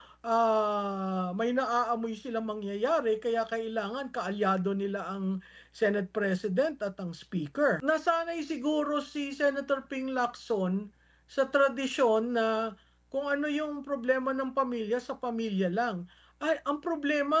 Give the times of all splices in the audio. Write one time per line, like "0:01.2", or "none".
0:07.8